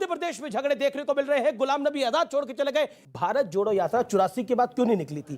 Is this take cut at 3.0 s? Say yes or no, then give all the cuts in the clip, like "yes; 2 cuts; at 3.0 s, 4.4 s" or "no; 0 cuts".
yes; 1 cut; at 3.0 s